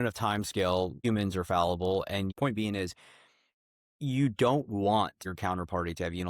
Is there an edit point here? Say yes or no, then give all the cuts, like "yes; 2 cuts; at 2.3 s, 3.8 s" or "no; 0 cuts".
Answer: yes; 3 cuts; at 1.0 s, 2.3 s, 5.2 s